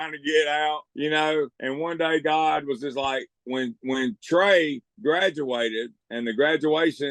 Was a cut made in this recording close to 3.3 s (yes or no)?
yes